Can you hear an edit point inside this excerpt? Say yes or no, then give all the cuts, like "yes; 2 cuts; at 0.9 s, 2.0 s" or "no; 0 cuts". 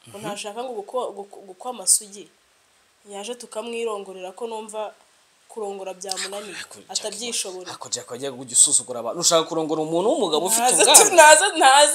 no; 0 cuts